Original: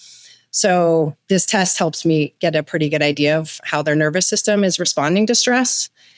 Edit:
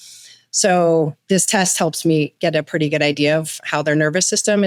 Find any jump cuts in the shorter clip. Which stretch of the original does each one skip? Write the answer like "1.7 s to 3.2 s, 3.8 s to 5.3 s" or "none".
none